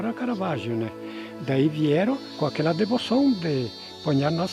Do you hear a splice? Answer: yes; 1 cut; at 2.3 s

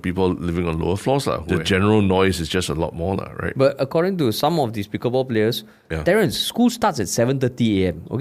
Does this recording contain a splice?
yes; 1 cut; at 1.4 s

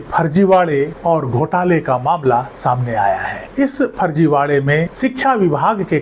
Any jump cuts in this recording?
yes; 1 cut; at 4.9 s

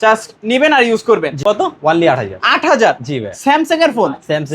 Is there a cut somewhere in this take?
yes; 1 cut; at 1.3 s

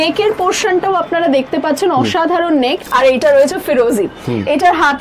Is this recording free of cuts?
no; 1 cut; at 2.8 s

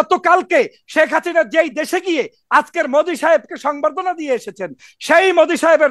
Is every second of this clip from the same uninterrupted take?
yes; 0 cuts

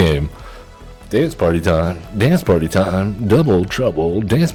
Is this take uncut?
yes; 0 cuts

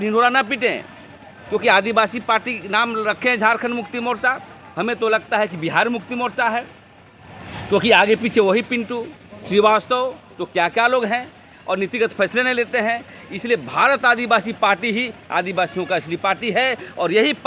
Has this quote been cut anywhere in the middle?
no; 0 cuts

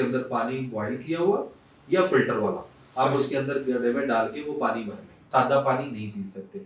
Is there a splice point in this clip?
yes; 1 cut; at 5.2 s

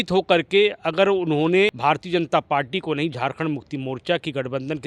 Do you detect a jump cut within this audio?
yes; 1 cut; at 1.8 s

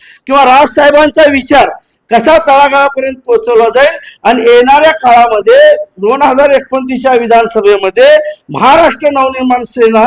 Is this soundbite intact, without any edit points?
yes; 0 cuts

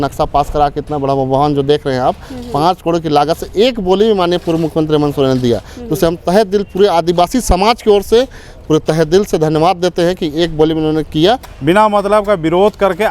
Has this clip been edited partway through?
yes; 1 cut; at 11.5 s

